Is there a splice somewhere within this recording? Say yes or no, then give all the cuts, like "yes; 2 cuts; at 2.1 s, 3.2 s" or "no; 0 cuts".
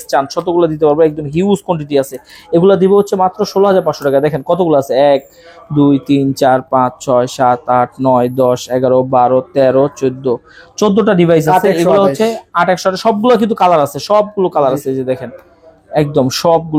no; 0 cuts